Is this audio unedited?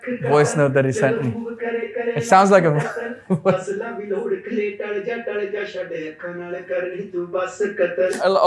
yes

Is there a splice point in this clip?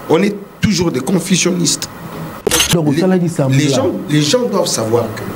yes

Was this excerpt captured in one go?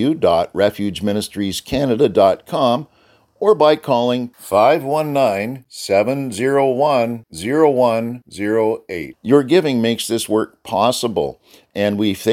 yes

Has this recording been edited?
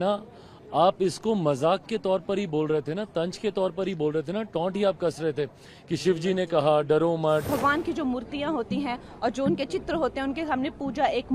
yes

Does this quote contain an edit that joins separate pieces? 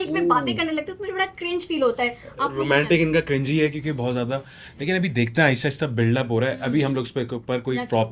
no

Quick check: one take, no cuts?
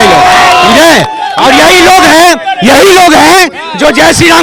yes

